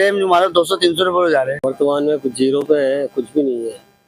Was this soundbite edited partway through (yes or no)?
yes